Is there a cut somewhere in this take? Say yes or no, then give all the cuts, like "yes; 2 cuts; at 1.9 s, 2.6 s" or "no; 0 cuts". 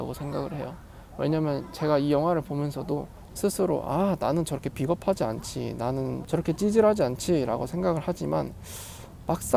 no; 0 cuts